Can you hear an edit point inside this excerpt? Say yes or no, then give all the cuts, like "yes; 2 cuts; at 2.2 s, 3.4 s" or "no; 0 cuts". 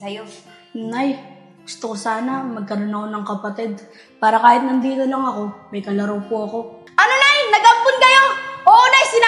yes; 1 cut; at 6.8 s